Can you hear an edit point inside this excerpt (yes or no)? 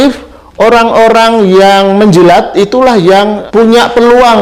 no